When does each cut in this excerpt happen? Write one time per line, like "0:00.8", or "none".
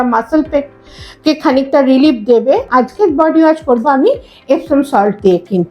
0:02.7

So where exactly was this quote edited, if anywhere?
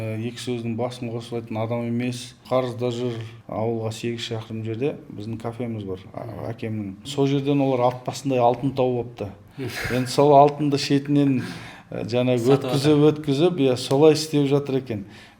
0:02.4
0:03.3
0:07.1

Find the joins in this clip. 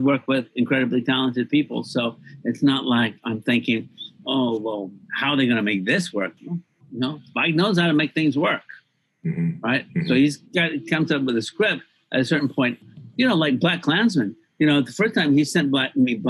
0:06.8

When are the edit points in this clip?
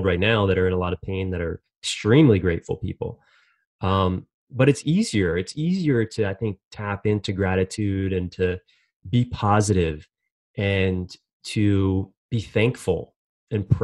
0:12.2

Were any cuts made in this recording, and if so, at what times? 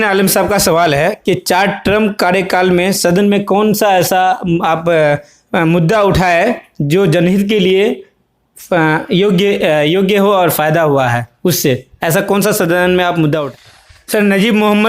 0:13.5

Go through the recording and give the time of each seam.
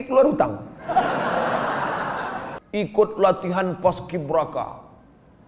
0:02.6

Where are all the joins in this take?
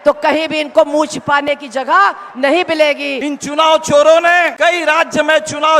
0:03.2
0:04.5

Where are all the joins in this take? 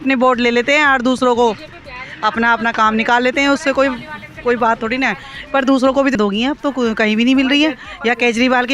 0:06.2

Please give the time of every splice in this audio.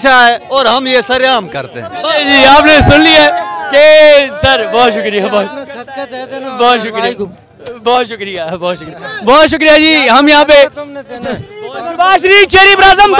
0:11.6

